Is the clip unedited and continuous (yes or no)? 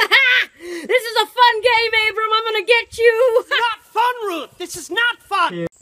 yes